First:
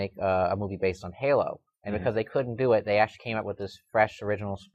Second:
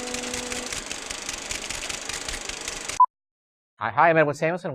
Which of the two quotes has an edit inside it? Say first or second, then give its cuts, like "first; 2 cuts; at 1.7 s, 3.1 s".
second; 1 cut; at 2.2 s